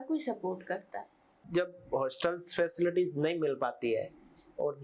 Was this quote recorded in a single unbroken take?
no; 1 cut; at 1.4 s

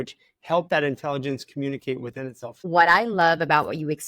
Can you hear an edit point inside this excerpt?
yes; 1 cut; at 2.6 s

